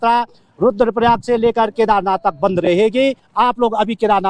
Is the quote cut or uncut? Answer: cut